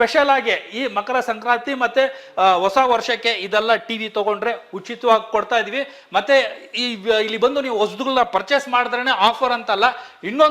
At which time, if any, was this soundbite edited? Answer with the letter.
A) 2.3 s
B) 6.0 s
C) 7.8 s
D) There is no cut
D